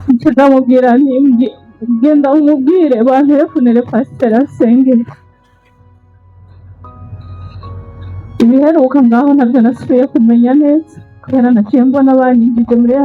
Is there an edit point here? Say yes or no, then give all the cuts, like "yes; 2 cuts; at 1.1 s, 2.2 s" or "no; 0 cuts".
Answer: no; 0 cuts